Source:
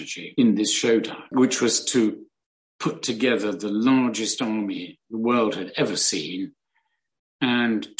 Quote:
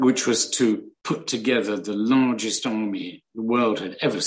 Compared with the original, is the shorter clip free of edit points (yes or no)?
no